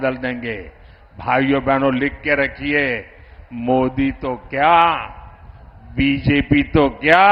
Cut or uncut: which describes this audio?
uncut